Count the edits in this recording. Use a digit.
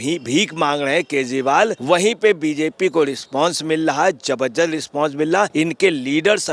2